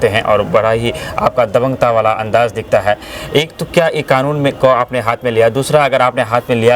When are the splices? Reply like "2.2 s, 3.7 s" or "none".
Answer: none